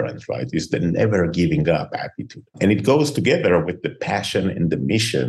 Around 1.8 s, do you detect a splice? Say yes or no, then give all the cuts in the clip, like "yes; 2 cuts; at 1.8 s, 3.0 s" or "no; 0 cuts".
no; 0 cuts